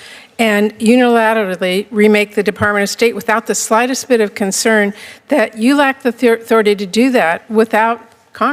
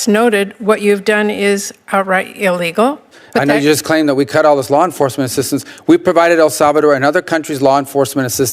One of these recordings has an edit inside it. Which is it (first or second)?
second